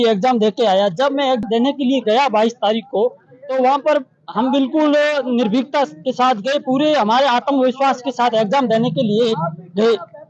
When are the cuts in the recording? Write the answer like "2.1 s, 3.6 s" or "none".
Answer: 1.4 s